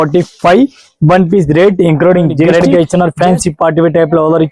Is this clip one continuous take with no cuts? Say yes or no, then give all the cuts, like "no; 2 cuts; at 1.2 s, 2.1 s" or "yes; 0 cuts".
no; 1 cut; at 2.5 s